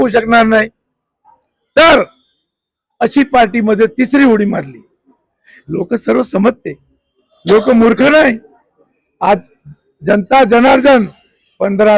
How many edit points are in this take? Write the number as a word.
zero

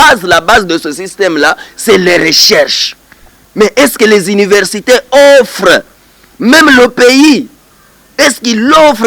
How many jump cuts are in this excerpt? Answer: zero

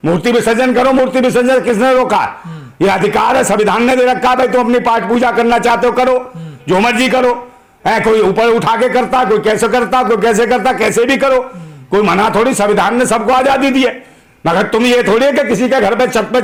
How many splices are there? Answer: zero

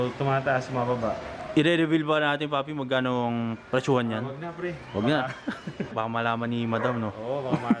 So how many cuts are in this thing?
two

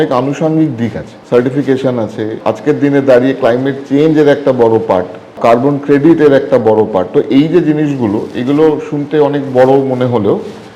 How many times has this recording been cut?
three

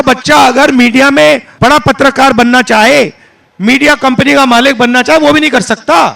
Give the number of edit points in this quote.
one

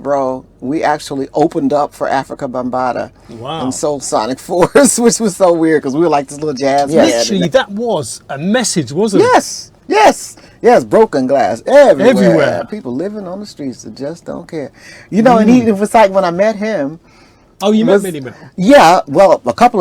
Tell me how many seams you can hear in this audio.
one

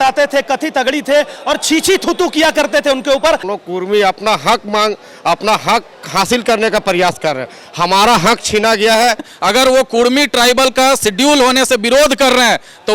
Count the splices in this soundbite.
two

